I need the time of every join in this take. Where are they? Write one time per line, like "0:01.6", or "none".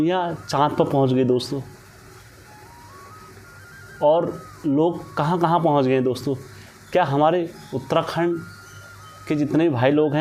none